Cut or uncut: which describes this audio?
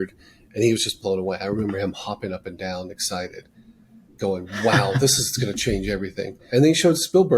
cut